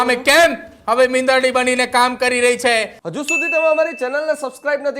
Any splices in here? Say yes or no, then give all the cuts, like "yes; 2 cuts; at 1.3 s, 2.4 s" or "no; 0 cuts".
yes; 1 cut; at 3.0 s